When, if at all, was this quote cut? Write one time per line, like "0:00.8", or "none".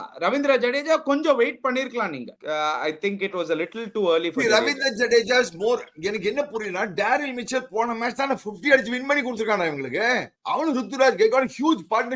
0:02.3
0:10.3